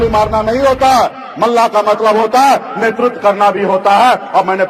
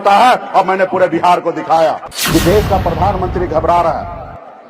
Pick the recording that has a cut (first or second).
second